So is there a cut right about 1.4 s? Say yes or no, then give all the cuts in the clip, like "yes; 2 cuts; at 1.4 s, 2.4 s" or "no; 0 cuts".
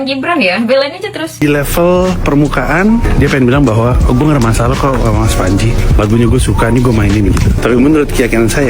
yes; 1 cut; at 1.4 s